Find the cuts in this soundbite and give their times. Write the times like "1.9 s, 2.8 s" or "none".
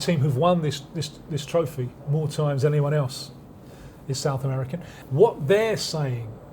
4.9 s

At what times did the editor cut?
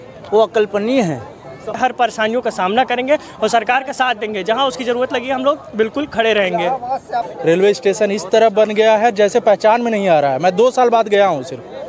1.8 s, 7.3 s

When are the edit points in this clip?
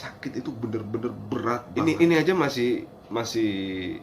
1.7 s

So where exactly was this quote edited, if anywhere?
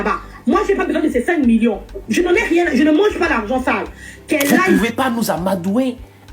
4.8 s

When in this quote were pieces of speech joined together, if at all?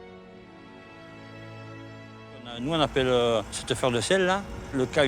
2.6 s

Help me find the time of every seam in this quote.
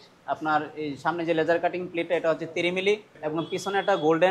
3.1 s

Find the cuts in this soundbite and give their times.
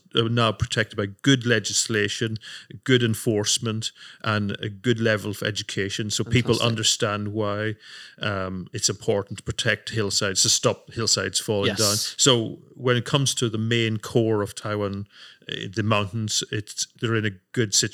16.8 s

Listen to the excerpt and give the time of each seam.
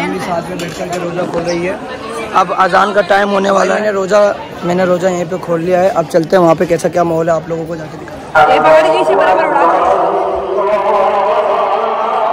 none

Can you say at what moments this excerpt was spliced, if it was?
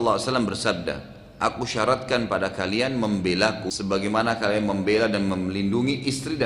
3.7 s

